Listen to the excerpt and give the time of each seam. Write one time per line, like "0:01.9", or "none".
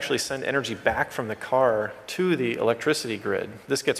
none